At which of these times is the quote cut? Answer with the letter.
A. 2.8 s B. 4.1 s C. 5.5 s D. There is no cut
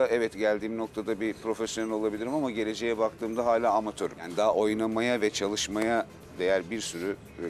D